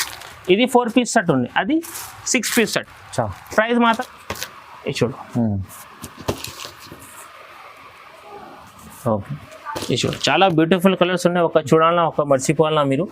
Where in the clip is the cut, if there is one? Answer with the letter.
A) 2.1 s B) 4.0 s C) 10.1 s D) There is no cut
B